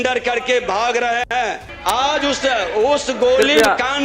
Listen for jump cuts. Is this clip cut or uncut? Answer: cut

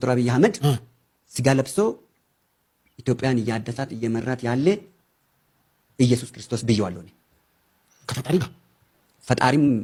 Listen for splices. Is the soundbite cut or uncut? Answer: uncut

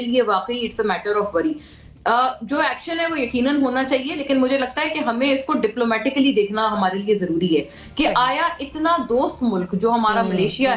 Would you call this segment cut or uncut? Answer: uncut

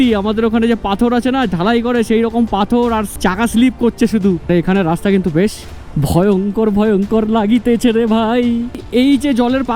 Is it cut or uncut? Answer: cut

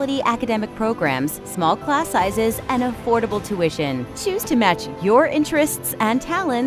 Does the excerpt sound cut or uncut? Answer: uncut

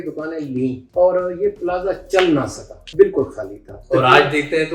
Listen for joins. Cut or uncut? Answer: cut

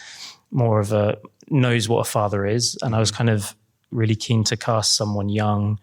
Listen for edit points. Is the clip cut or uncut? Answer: uncut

